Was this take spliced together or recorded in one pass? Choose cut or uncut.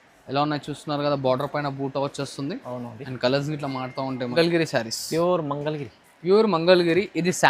cut